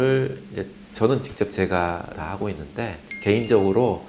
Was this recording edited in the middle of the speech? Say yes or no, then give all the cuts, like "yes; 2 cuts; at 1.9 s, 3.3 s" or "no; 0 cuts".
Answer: no; 0 cuts